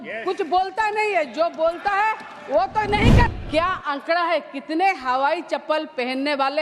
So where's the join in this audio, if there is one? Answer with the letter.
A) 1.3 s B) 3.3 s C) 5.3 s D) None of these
B